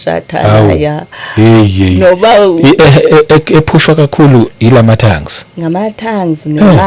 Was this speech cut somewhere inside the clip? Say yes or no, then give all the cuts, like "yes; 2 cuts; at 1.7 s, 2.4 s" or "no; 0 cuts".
no; 0 cuts